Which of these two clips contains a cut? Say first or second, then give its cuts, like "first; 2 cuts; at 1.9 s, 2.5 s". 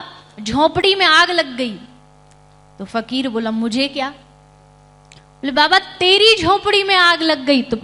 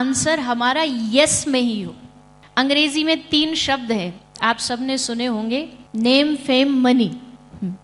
second; 2 cuts; at 2.4 s, 5.8 s